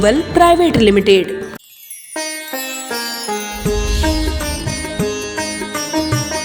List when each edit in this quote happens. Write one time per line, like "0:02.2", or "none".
0:04.7